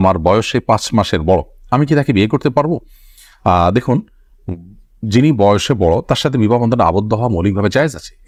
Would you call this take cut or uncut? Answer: uncut